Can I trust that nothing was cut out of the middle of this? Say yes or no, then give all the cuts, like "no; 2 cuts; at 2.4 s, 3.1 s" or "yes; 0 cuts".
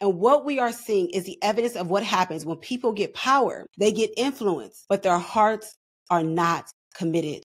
no; 2 cuts; at 3.6 s, 4.7 s